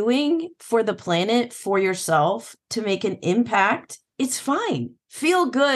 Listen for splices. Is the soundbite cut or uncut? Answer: cut